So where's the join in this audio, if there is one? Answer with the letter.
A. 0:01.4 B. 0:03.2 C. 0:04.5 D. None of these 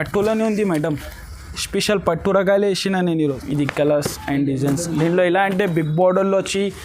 B